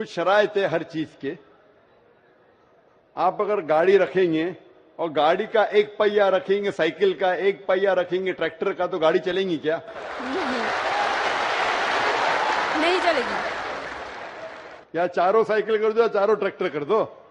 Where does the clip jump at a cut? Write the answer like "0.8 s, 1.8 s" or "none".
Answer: 15.8 s